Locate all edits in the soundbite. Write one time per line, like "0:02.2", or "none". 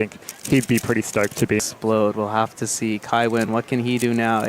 0:01.7